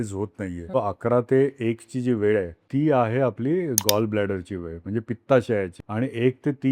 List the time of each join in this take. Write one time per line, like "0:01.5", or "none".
0:00.7
0:02.6
0:05.8